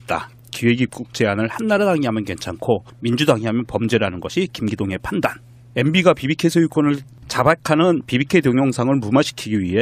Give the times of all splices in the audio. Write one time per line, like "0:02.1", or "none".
0:08.2

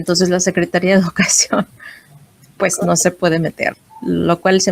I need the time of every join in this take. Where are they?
0:03.7

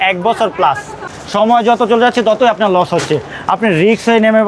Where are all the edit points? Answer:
0:01.0

